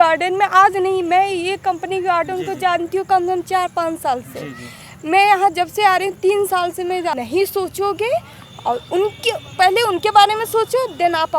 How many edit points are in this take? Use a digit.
1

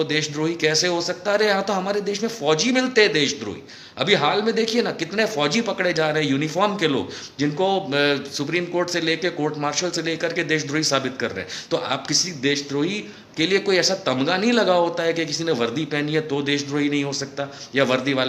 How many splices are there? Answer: 0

